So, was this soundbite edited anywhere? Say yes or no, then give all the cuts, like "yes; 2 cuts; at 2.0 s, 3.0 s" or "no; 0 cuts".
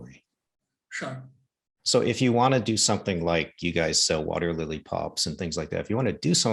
no; 0 cuts